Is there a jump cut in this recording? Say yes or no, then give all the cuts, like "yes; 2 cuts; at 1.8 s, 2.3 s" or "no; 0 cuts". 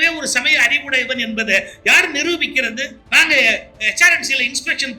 yes; 1 cut; at 3.0 s